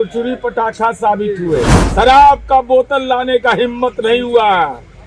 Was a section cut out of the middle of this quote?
yes; 1 cut; at 1.8 s

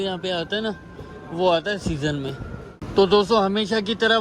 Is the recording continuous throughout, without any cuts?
yes; 0 cuts

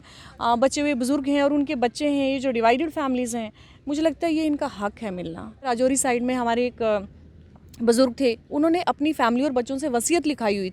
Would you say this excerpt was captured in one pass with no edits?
no; 1 cut; at 5.7 s

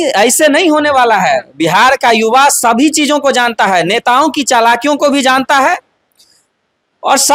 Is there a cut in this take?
no; 0 cuts

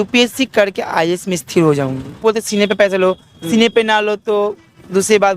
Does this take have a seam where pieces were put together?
yes; 1 cut; at 2.2 s

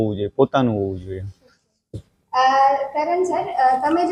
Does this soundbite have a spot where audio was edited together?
no; 0 cuts

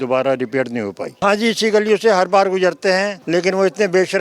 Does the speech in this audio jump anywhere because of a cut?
yes; 2 cuts; at 1.1 s, 3.2 s

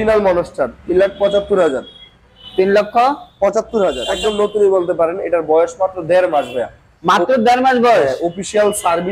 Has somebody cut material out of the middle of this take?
yes; 1 cut; at 4.1 s

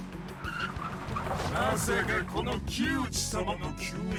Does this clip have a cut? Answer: no; 0 cuts

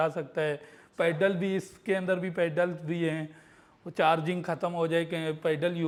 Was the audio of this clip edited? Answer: no; 0 cuts

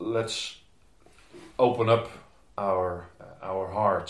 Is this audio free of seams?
no; 1 cut; at 3.2 s

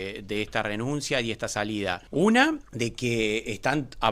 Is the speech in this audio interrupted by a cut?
yes; 2 cuts; at 2.0 s, 2.7 s

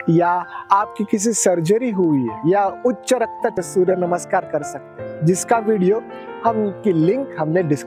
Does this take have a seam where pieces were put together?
yes; 1 cut; at 3.6 s

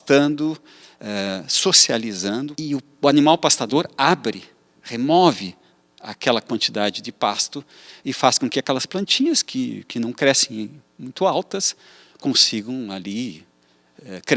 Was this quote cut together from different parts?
yes; 1 cut; at 2.5 s

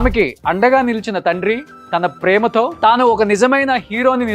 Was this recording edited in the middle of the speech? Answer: yes; 1 cut; at 2.7 s

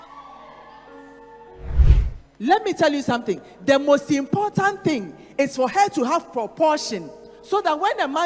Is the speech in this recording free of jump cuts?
no; 1 cut; at 1.8 s

